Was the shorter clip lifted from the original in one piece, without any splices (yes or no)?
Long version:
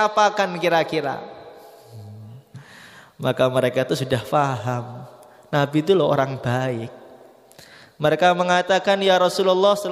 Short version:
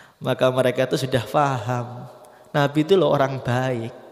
yes